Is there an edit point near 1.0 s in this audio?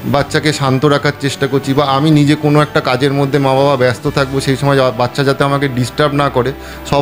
no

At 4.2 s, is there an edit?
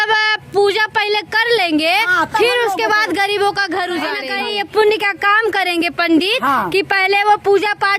yes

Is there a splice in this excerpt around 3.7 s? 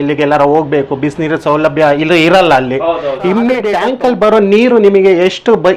yes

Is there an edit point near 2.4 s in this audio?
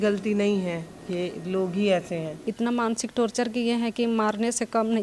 yes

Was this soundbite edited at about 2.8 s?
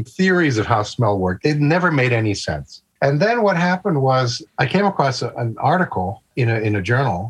no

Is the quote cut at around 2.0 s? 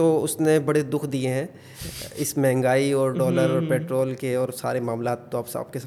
no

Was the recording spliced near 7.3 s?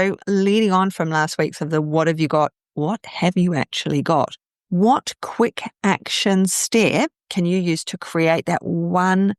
no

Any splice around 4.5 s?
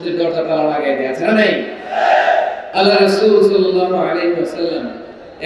no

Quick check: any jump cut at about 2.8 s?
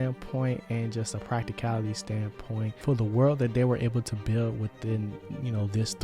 yes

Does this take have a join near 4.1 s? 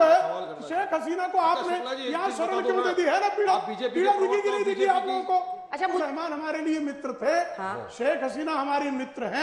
no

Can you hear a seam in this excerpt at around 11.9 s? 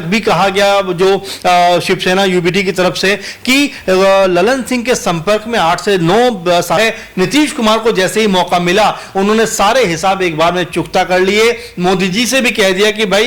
no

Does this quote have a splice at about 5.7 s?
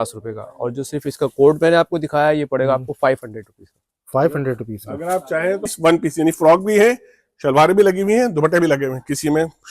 yes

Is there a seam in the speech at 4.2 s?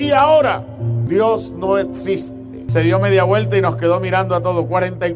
no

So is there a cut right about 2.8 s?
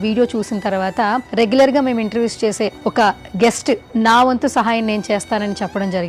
yes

